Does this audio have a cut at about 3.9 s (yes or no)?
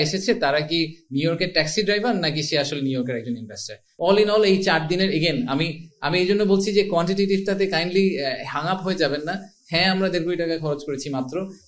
yes